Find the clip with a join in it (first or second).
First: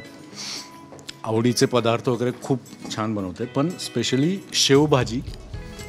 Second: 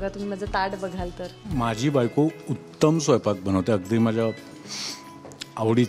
second